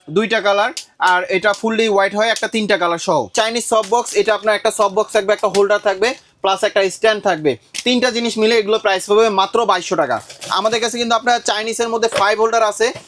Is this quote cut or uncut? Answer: cut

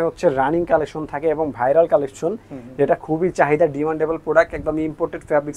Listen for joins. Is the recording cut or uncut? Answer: uncut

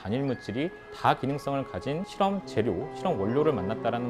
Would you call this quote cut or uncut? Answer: cut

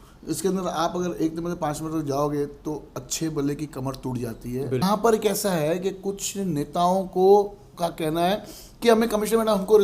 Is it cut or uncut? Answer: cut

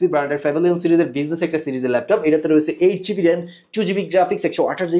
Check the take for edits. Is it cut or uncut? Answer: uncut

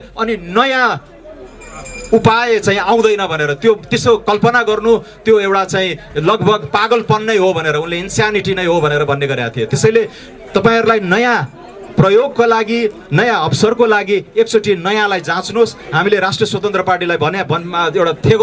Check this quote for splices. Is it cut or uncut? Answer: uncut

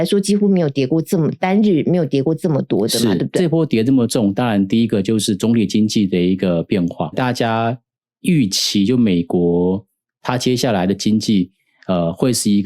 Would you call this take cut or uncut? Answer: cut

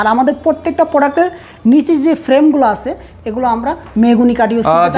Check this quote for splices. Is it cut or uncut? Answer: uncut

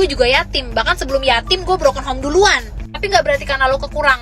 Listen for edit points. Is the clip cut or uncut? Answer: uncut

